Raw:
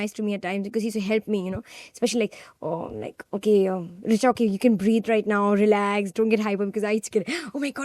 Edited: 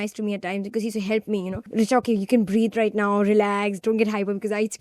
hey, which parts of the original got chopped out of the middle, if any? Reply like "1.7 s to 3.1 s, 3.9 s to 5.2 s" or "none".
1.6 s to 3.9 s